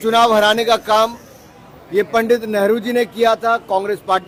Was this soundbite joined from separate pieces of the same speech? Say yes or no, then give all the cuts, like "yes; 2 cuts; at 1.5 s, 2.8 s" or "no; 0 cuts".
no; 0 cuts